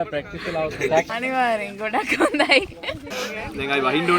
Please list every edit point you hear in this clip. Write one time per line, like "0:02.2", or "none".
0:01.1
0:03.1